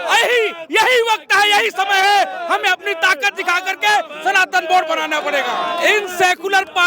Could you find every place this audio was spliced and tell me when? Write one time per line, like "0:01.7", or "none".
0:05.5